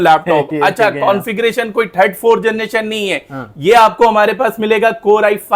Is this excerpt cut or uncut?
uncut